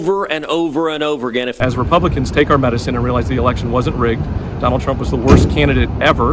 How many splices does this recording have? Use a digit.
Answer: 1